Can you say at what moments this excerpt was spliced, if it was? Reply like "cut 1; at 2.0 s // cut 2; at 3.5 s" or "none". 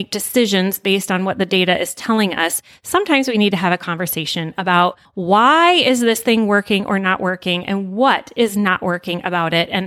cut 1; at 5.1 s